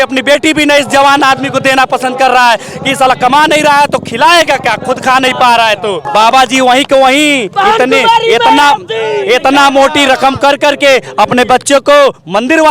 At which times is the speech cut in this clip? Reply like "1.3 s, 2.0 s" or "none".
6.0 s